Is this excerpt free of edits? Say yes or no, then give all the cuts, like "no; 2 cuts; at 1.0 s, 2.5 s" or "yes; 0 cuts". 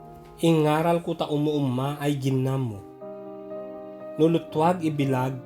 yes; 0 cuts